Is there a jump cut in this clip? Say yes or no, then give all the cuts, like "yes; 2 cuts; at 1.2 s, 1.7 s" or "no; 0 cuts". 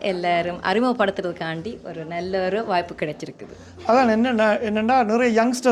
no; 0 cuts